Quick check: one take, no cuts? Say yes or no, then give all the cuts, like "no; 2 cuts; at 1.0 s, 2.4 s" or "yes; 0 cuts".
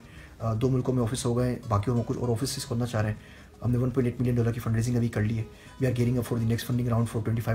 yes; 0 cuts